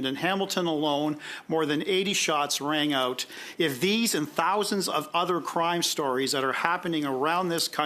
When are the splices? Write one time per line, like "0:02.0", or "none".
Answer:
0:03.4